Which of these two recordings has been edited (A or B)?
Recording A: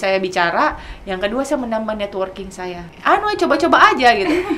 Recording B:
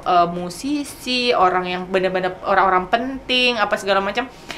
A